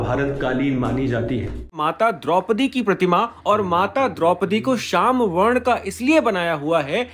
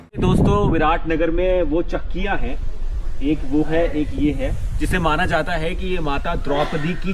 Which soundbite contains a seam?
first; 1 cut; at 1.8 s

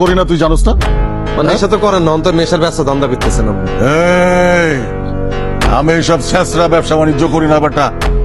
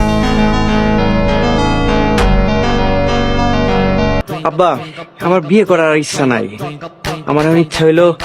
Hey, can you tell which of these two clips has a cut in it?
second; 1 cut; at 4.3 s

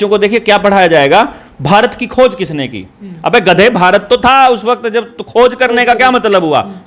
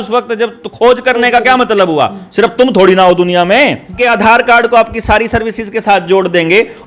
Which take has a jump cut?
second; 1 cut; at 4.0 s

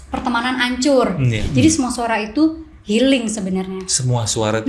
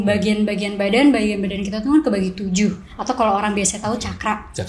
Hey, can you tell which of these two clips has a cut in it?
first; 1 cut; at 1.3 s

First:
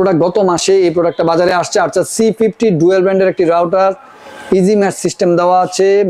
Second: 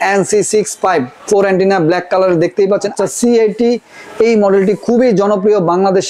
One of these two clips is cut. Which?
second; 1 cut; at 2.9 s

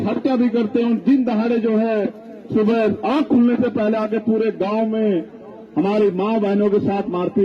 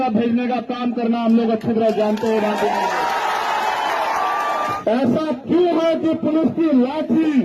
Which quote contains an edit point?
second; 1 cut; at 4.8 s

